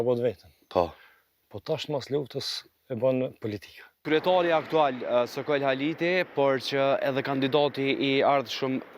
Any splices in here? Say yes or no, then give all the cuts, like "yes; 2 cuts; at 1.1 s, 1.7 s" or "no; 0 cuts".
yes; 1 cut; at 4.0 s